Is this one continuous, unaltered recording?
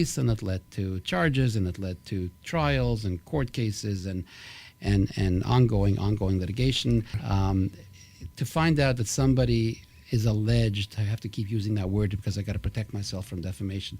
no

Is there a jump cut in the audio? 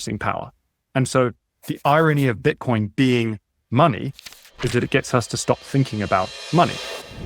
yes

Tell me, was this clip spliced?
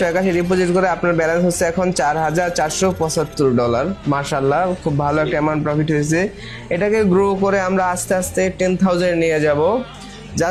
no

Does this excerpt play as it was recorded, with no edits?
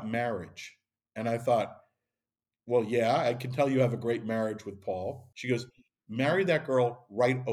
no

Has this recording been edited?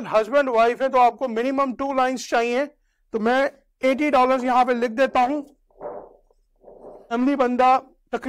yes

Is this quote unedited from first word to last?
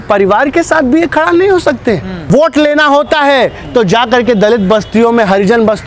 no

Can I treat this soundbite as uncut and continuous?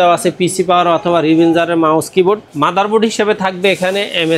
no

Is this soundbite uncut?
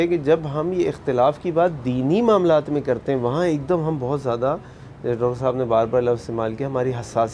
yes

